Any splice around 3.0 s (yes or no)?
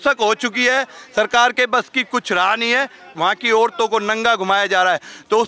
yes